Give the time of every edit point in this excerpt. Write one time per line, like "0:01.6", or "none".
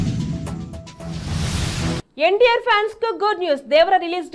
0:02.0